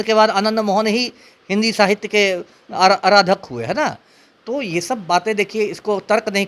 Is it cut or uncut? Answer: uncut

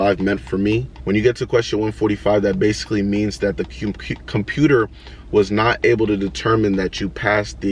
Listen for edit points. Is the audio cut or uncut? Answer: cut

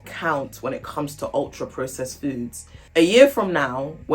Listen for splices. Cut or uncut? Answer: cut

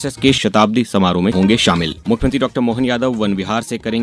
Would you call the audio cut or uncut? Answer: cut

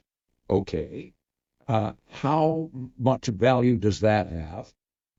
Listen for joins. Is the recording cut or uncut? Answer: uncut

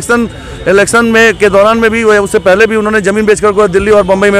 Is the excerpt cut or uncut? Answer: uncut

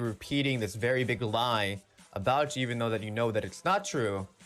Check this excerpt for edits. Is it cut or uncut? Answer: uncut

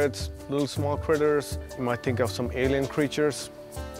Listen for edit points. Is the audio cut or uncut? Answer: cut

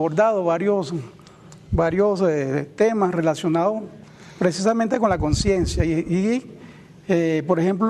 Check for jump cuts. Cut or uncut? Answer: cut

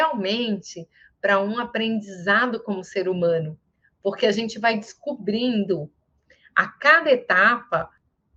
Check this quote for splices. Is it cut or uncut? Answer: uncut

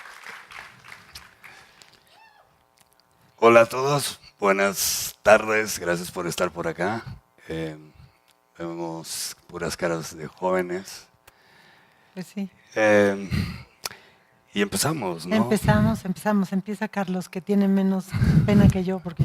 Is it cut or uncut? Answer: uncut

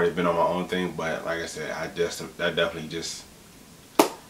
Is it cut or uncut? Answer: uncut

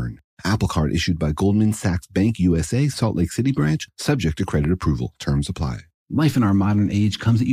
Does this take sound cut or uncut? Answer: cut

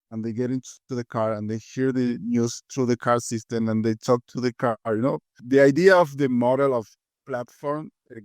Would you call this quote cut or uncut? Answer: cut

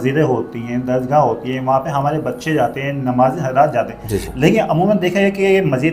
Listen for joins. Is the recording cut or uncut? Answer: uncut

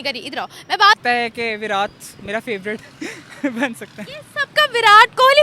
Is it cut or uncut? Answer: cut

